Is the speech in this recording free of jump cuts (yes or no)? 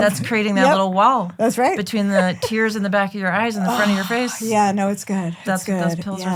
yes